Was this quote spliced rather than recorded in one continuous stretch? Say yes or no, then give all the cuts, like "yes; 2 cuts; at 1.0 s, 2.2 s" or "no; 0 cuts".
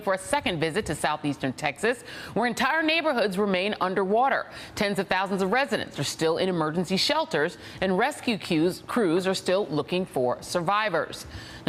no; 0 cuts